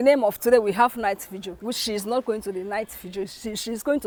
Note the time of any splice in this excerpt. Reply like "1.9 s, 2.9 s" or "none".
none

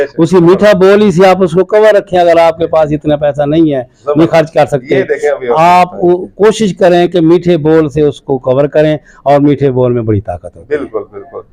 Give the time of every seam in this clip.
none

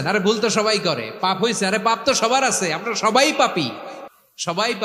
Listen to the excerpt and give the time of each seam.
none

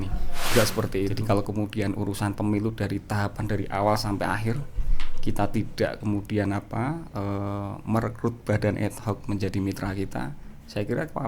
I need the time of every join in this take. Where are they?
1.2 s

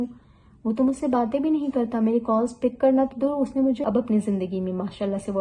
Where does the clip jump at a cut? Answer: 3.8 s

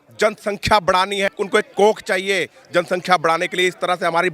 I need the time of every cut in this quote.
1.3 s

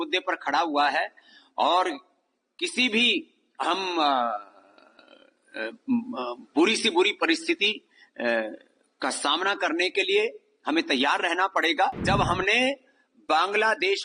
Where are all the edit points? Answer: 12.0 s

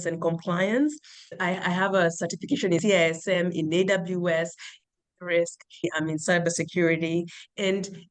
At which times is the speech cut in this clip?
1.3 s, 5.8 s

